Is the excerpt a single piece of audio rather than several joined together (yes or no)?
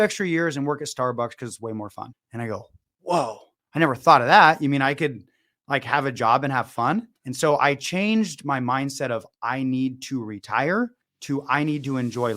no